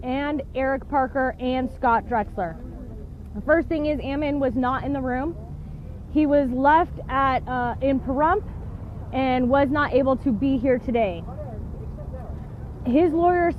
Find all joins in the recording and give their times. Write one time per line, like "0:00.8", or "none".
0:09.9